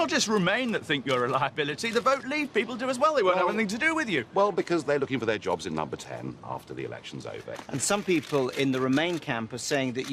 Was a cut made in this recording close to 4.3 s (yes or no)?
no